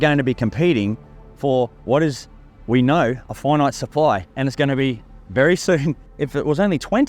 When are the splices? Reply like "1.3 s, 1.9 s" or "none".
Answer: 6.1 s

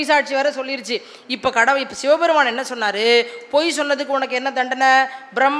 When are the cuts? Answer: none

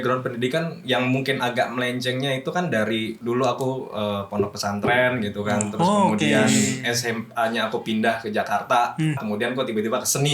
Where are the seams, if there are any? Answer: 3.1 s, 9.2 s

